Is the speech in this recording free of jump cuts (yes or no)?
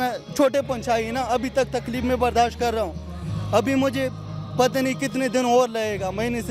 yes